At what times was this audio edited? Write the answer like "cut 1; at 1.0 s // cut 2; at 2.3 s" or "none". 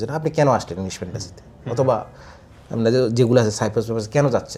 none